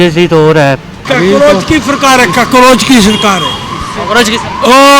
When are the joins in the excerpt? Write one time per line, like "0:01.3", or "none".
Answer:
0:00.9